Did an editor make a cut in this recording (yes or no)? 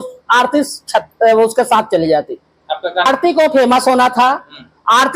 yes